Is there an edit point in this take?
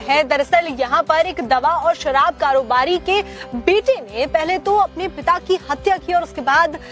yes; 1 cut; at 1.4 s

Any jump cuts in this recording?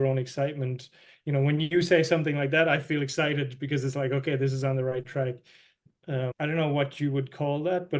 yes; 1 cut; at 5.8 s

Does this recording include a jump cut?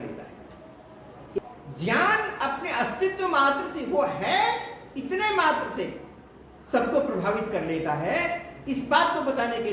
yes; 1 cut; at 1.4 s

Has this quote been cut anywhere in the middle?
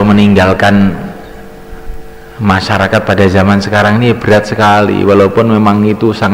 no; 0 cuts

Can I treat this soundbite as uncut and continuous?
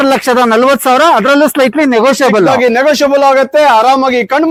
yes; 0 cuts

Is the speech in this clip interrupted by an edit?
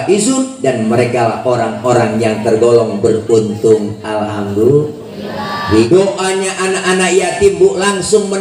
yes; 1 cut; at 5.7 s

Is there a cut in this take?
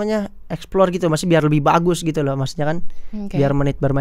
no; 0 cuts

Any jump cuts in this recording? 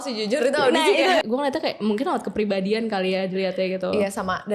yes; 1 cut; at 1.2 s

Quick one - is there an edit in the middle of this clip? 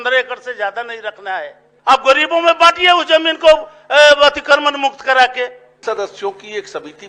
yes; 2 cuts; at 1.7 s, 5.7 s

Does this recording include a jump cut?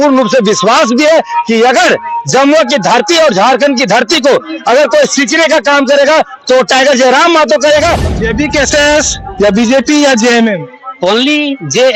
yes; 1 cut; at 8.0 s

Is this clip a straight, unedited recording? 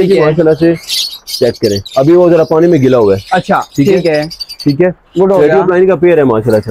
yes; 0 cuts

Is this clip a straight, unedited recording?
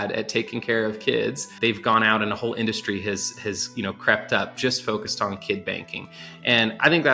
no; 1 cut; at 1.5 s

